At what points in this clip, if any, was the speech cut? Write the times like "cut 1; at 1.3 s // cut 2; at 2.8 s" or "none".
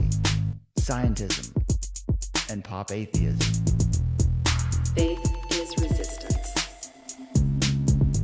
none